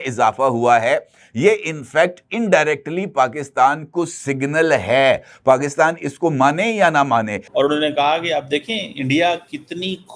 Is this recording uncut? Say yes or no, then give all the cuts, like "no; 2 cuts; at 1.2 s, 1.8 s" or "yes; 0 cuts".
no; 1 cut; at 7.4 s